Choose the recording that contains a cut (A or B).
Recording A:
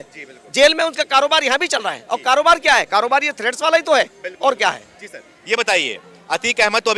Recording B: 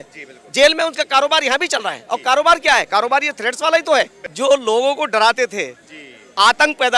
B